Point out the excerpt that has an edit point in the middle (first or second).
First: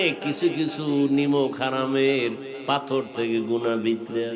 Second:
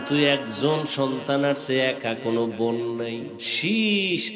second